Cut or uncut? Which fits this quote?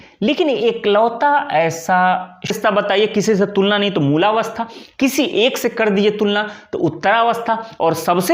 cut